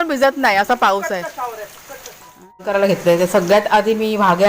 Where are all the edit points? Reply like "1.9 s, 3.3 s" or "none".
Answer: 2.7 s